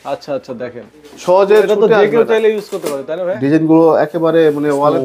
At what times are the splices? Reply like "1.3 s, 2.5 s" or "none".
3.2 s